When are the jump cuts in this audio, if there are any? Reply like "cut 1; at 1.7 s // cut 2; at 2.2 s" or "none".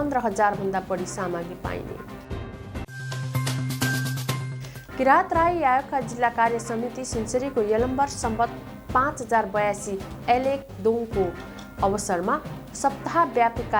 none